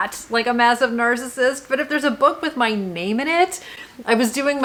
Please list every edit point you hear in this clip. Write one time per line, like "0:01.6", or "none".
none